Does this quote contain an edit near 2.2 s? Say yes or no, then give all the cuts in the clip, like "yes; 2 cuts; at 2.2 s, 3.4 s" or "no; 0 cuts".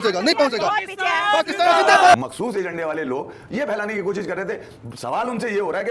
yes; 1 cut; at 2.2 s